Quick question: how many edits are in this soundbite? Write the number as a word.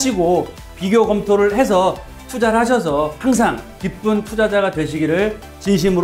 one